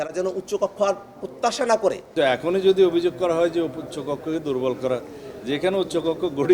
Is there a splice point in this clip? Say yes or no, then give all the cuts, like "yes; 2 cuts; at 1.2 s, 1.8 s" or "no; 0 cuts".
yes; 1 cut; at 2.1 s